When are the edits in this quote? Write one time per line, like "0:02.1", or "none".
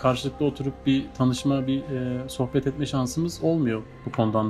none